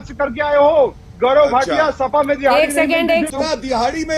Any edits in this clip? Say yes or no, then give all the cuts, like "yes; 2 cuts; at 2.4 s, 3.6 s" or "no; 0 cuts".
yes; 2 cuts; at 1.0 s, 3.3 s